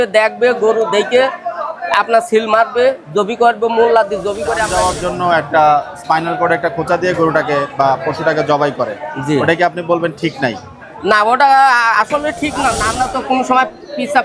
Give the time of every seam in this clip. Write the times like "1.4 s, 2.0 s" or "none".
4.8 s, 12.9 s